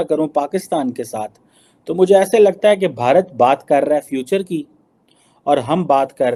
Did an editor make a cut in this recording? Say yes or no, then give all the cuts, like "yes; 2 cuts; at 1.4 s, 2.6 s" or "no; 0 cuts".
no; 0 cuts